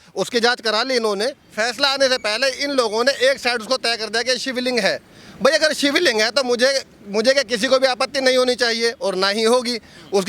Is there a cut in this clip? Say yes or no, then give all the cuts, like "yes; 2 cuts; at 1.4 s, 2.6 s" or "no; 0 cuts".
yes; 1 cut; at 1.5 s